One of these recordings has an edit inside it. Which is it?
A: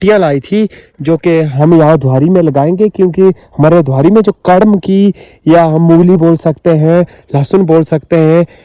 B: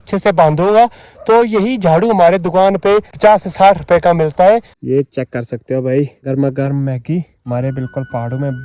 B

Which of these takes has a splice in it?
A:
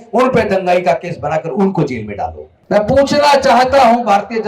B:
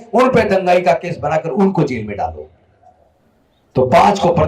A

